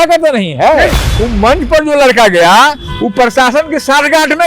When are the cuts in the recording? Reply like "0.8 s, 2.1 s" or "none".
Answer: 1.0 s

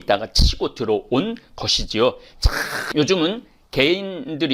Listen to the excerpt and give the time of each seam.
2.8 s

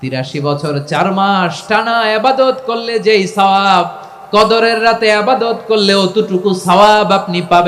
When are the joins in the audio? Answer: none

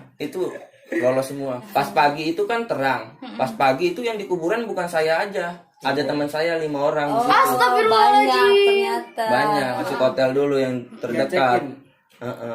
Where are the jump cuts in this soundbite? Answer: 1.6 s, 9.8 s

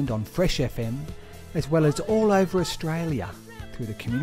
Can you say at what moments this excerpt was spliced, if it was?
none

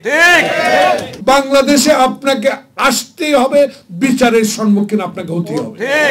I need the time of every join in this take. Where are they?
1.1 s

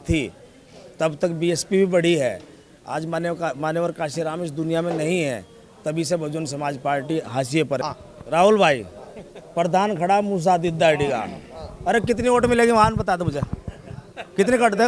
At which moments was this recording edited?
7.8 s

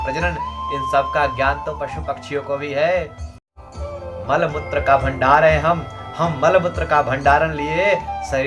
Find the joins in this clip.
3.4 s

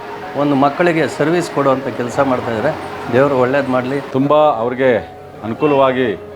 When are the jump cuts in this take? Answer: 4.0 s

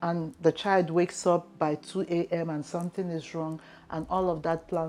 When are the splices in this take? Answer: none

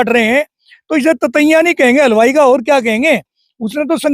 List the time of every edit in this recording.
none

